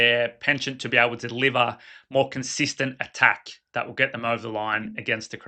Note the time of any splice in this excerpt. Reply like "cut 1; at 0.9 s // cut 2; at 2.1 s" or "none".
none